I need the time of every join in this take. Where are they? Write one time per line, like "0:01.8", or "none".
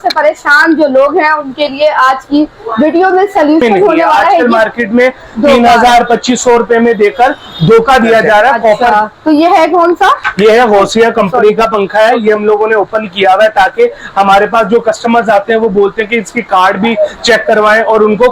0:04.4
0:08.9